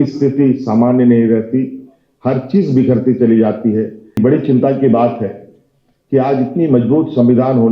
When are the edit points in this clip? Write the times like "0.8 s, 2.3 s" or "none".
4.2 s